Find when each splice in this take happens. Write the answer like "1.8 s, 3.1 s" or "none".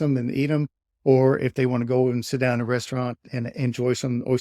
3.3 s